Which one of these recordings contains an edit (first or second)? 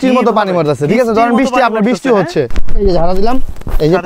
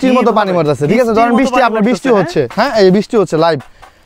first